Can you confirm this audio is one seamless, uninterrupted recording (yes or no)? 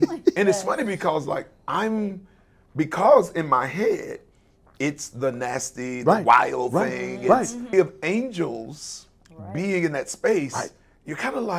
no